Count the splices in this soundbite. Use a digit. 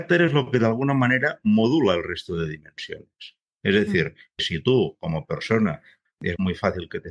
1